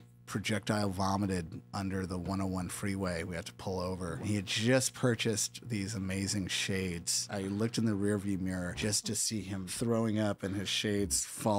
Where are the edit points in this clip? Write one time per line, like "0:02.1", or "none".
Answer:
0:04.2